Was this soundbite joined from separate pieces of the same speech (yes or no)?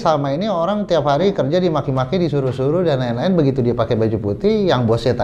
no